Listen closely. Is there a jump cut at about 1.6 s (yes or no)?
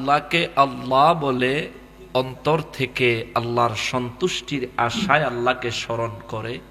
no